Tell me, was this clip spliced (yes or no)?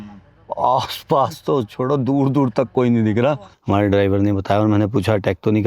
yes